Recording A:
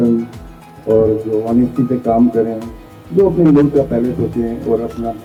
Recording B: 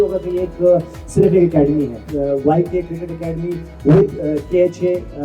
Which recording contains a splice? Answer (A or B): B